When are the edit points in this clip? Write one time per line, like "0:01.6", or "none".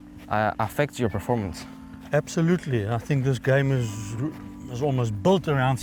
none